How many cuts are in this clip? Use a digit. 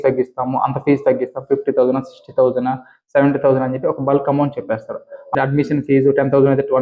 1